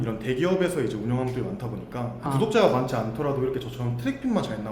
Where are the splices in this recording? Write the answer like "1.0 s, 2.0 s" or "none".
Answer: 2.3 s